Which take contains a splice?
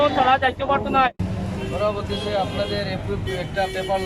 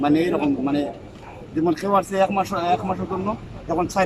first; 1 cut; at 1.1 s

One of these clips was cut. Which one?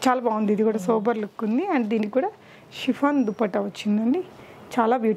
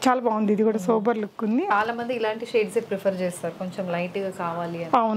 second; 1 cut; at 1.7 s

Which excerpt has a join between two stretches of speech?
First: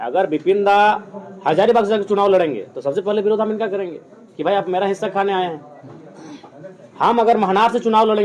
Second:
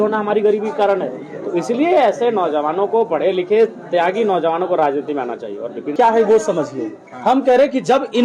second; 1 cut; at 5.9 s

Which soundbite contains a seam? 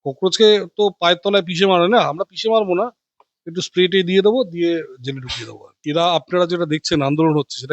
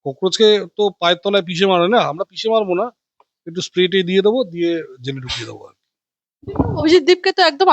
first; 1 cut; at 5.8 s

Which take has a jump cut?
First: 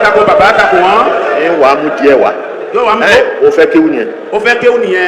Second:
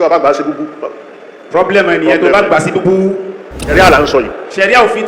second; 1 cut; at 3.7 s

